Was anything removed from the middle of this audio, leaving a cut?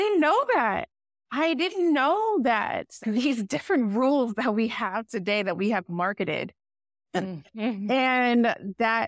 no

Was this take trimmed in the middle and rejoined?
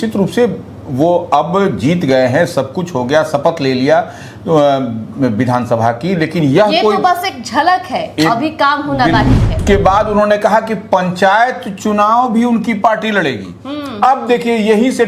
yes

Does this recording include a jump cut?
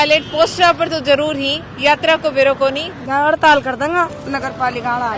yes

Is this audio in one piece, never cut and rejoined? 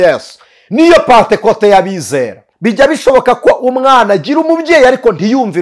no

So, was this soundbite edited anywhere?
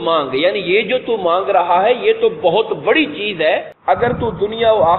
yes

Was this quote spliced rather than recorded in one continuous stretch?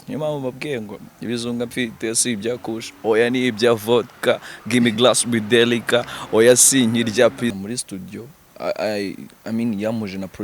yes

